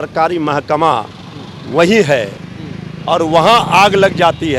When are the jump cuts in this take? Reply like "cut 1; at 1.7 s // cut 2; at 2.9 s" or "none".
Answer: none